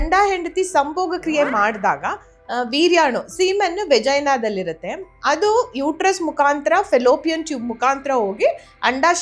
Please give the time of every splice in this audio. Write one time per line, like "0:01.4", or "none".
none